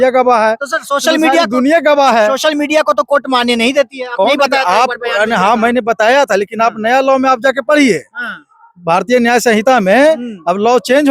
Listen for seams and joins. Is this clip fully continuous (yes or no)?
yes